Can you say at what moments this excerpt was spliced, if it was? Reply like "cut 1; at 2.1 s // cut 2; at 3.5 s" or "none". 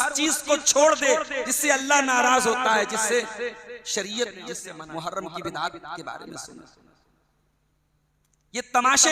cut 1; at 4.7 s